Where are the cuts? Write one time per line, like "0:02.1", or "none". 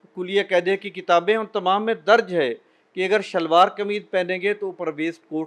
none